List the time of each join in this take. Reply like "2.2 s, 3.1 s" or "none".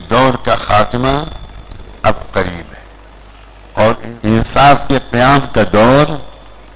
4.0 s